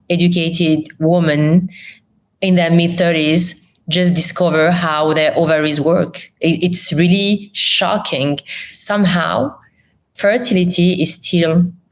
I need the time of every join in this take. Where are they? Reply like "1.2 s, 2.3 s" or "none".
8.7 s